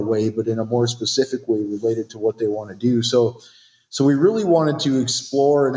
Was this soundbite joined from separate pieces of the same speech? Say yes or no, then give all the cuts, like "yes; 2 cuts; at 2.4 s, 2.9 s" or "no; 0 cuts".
no; 0 cuts